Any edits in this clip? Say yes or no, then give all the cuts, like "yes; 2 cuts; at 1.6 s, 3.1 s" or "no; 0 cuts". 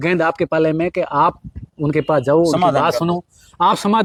no; 0 cuts